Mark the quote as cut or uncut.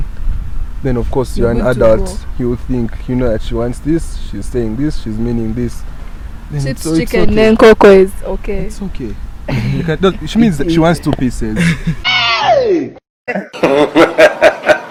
uncut